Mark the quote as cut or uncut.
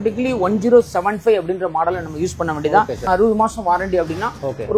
cut